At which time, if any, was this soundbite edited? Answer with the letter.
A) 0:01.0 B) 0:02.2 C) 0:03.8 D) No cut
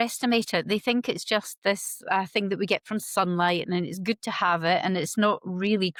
D